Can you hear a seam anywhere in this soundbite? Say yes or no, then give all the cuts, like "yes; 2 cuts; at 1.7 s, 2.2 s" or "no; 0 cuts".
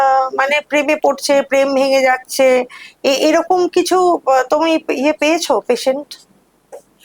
no; 0 cuts